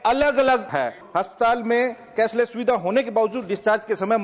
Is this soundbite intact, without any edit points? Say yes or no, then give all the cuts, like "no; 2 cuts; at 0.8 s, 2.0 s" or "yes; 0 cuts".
no; 1 cut; at 1.0 s